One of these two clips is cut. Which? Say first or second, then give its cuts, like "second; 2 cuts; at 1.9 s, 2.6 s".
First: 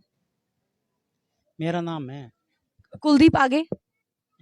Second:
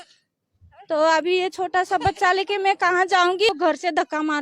second; 1 cut; at 3.5 s